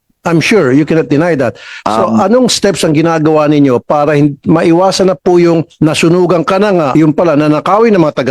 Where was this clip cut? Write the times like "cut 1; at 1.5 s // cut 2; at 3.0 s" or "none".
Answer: cut 1; at 6.9 s